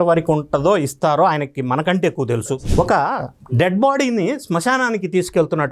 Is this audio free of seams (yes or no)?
no